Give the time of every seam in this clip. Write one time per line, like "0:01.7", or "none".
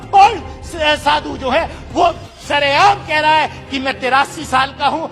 none